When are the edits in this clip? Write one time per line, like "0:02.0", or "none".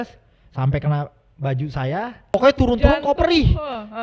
0:02.3